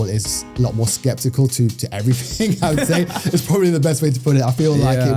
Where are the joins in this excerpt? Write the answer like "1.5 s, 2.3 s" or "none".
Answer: none